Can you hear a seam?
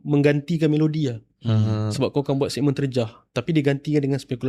no; 0 cuts

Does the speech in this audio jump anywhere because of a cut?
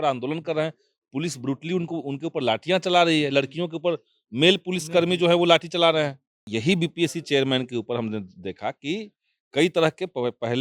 yes; 1 cut; at 6.5 s

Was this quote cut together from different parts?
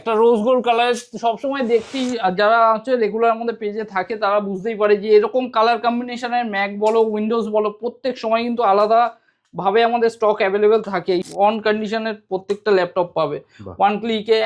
yes; 1 cut; at 11.2 s

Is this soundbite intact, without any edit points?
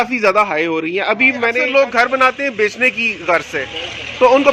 no; 1 cut; at 1.6 s

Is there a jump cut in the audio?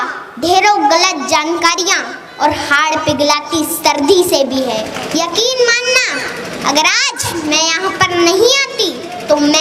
yes; 1 cut; at 5.0 s

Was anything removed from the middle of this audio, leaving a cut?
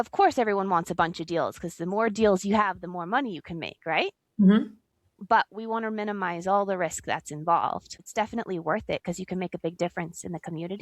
yes; 1 cut; at 8.0 s

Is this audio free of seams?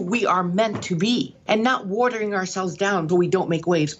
no; 2 cuts; at 1.4 s, 3.0 s

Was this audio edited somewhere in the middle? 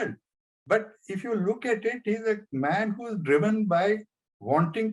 no; 0 cuts

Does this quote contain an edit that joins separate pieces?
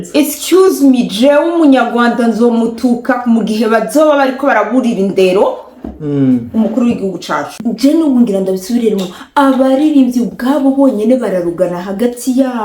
yes; 1 cut; at 7.6 s

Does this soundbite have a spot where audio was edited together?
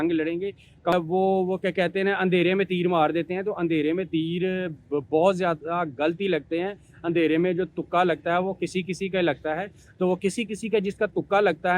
yes; 1 cut; at 0.9 s

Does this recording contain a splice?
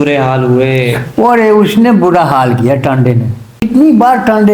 yes; 1 cut; at 3.6 s

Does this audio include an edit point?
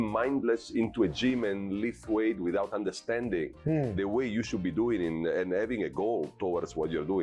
no; 0 cuts

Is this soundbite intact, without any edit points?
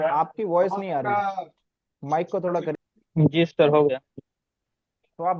no; 1 cut; at 2.7 s

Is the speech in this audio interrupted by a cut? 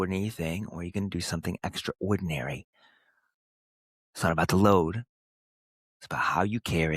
no; 0 cuts

